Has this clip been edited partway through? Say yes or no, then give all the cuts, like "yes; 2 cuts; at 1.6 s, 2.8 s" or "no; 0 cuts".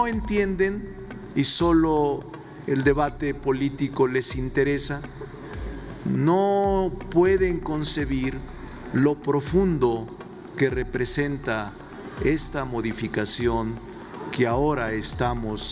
no; 0 cuts